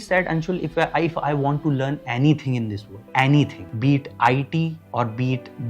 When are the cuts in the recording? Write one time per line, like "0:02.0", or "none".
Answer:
0:03.6
0:04.8